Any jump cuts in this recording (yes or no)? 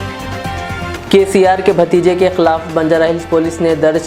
yes